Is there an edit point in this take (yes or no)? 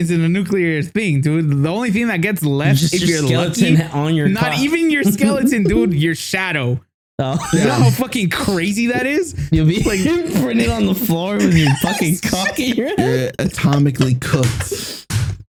no